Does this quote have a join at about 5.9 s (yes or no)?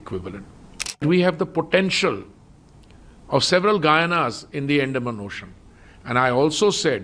no